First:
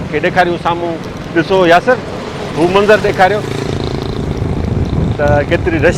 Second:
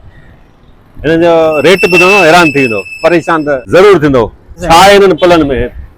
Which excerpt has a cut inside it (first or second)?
second